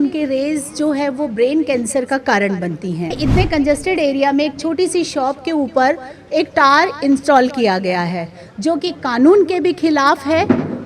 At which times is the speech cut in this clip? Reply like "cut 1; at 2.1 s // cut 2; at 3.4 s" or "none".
cut 1; at 3.2 s